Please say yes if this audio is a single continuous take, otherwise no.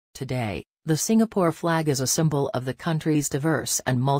yes